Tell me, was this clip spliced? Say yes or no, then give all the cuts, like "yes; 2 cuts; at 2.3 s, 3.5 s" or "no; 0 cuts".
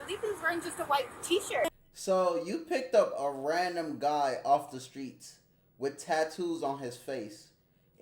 yes; 1 cut; at 1.6 s